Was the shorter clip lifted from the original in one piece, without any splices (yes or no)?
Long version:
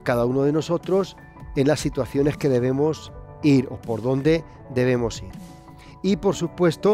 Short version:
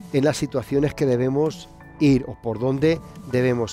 yes